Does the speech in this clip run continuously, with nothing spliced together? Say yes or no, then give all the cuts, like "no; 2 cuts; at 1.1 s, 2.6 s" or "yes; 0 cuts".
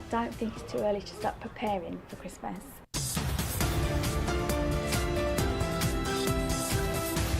no; 1 cut; at 2.7 s